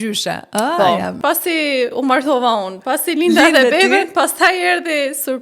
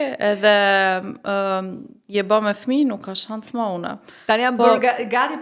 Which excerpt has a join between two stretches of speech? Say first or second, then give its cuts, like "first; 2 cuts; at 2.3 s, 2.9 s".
first; 1 cut; at 1.2 s